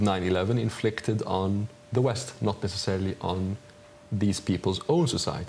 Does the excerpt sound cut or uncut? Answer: cut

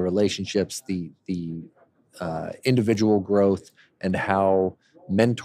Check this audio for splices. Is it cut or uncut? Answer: uncut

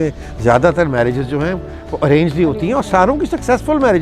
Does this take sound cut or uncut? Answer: uncut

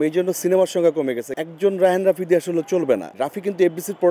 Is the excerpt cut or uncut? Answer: cut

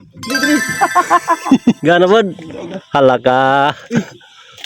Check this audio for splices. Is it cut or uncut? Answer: cut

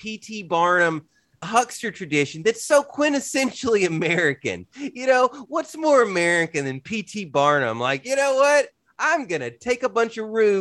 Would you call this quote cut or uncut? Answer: cut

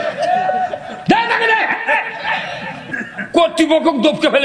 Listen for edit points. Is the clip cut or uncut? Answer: cut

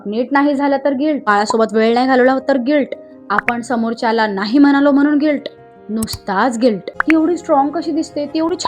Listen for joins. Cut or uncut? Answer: cut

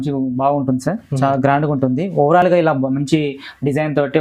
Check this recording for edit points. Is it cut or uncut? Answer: uncut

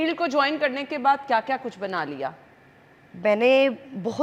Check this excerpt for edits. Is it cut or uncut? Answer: uncut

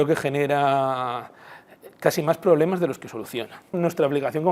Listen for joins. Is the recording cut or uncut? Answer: cut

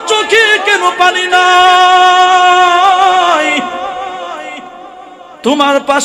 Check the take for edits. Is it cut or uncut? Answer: uncut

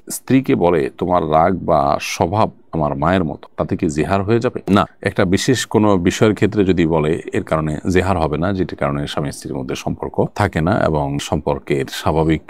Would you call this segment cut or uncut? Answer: uncut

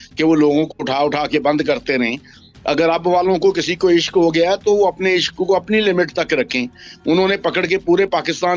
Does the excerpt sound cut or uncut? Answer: uncut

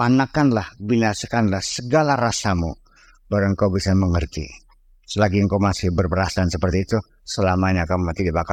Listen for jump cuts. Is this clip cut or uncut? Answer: uncut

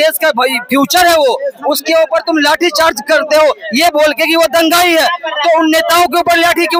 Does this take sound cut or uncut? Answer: uncut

